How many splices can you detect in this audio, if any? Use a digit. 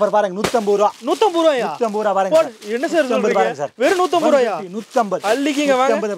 0